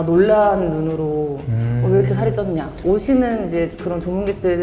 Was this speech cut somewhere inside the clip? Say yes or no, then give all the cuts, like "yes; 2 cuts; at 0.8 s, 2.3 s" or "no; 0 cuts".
yes; 1 cut; at 2.8 s